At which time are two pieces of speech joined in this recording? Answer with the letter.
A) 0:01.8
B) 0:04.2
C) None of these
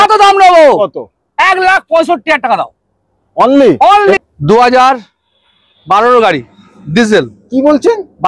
B